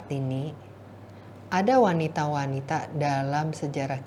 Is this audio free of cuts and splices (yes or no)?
yes